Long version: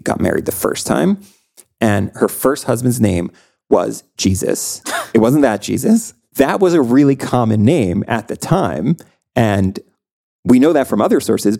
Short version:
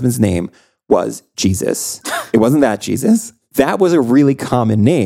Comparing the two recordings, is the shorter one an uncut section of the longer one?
yes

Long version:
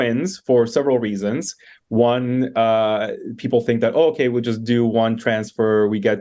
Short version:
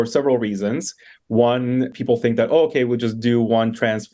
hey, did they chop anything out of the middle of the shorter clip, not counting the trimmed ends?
yes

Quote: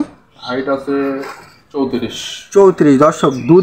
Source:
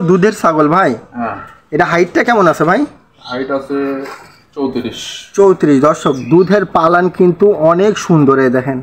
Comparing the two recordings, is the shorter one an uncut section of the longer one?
yes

